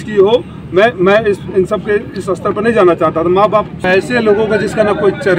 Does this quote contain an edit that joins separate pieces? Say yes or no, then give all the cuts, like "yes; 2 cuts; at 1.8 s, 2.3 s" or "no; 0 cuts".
yes; 1 cut; at 3.8 s